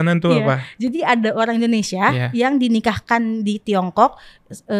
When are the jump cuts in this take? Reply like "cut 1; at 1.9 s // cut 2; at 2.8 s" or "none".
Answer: none

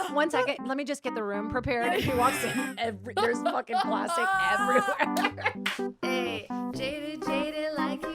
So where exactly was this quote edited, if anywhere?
cut 1; at 5.6 s

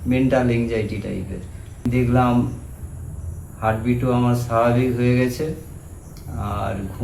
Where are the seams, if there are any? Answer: cut 1; at 1.9 s

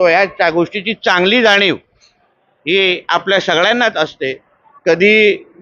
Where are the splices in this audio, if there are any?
none

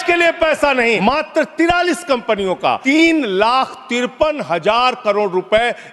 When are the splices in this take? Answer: cut 1; at 1.0 s // cut 2; at 2.8 s

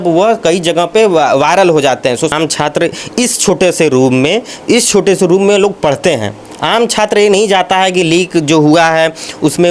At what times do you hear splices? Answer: cut 1; at 2.3 s

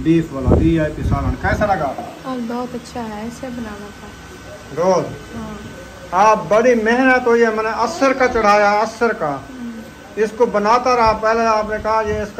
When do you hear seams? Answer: none

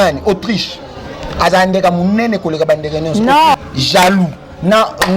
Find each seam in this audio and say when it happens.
cut 1; at 3.5 s

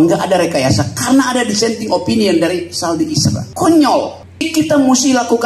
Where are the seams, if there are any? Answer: cut 1; at 3.5 s // cut 2; at 4.2 s

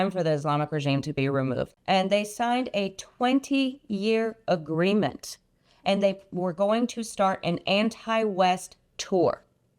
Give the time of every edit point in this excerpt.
cut 1; at 1.7 s

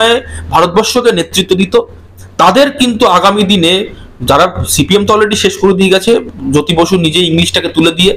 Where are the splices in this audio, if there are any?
none

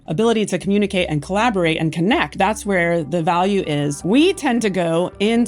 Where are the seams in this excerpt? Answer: cut 1; at 2.3 s // cut 2; at 4.0 s

